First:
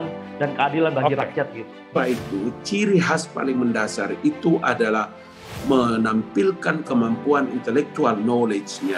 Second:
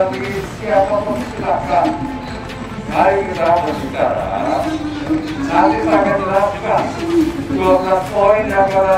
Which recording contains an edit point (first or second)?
first